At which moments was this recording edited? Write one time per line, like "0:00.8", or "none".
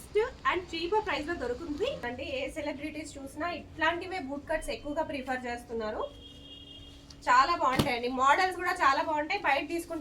0:01.8